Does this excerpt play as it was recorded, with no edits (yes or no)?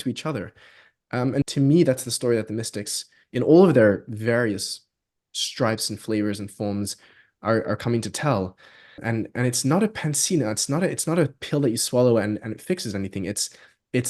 no